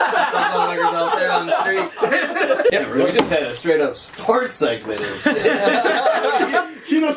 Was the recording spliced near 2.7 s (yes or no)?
yes